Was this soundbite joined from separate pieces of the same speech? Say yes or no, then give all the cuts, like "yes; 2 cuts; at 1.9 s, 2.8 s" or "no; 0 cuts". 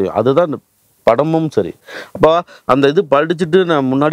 no; 0 cuts